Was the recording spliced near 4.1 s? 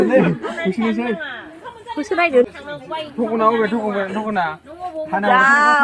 no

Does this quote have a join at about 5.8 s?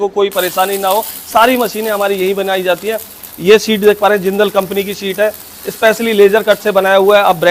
no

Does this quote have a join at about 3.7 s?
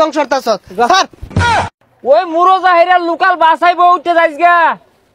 no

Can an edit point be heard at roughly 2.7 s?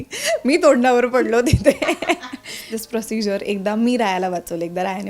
yes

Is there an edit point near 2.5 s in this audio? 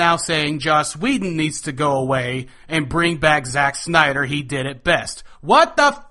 no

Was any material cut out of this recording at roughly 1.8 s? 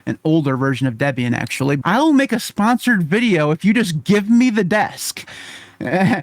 yes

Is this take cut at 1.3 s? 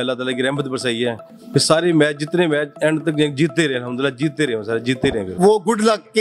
yes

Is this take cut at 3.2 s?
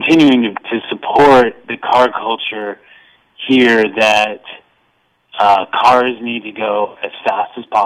no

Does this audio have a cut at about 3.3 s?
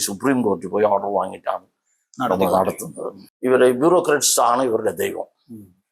yes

